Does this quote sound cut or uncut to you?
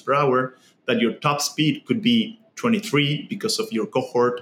uncut